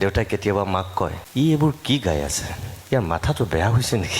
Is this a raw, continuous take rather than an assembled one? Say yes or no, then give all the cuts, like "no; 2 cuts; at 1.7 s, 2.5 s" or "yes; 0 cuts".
no; 1 cut; at 1.2 s